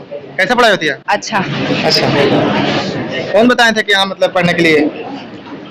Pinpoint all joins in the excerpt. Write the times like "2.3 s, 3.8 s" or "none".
none